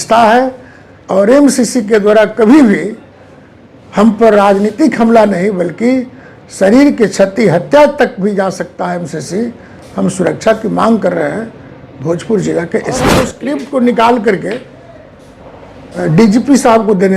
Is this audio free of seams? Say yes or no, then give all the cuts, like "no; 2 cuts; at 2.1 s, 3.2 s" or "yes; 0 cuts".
no; 1 cut; at 13.2 s